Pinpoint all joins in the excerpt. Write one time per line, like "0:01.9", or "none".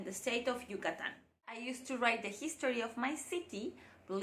0:01.7

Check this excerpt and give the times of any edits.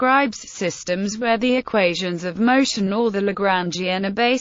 0:03.1

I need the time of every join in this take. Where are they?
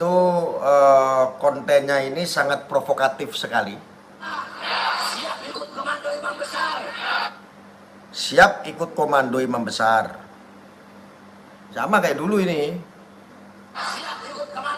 0:04.2

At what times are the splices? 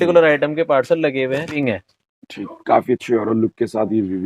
0:01.6

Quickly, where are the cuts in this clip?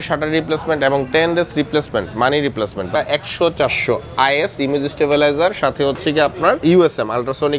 0:02.9

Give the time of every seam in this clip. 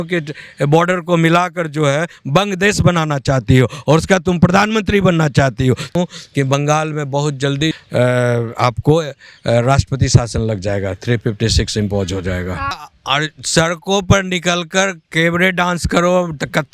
0:05.9
0:07.7
0:12.9

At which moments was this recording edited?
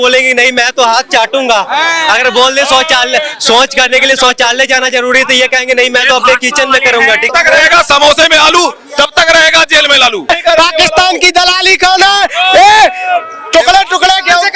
0:07.3
0:10.3

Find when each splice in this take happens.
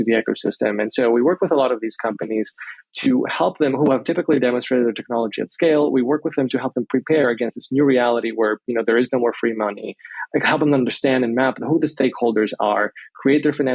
0:02.9

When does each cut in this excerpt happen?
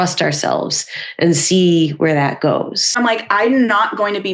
0:02.9

